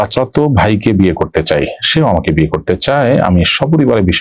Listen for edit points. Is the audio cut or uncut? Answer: uncut